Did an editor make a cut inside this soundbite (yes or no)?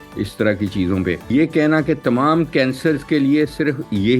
yes